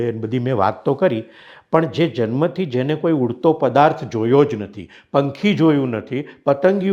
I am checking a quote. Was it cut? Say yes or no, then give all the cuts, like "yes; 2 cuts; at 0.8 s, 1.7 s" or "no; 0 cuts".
no; 0 cuts